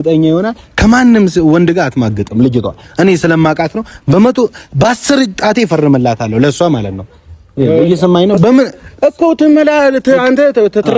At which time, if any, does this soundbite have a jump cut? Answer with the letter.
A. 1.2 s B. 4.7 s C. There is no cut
C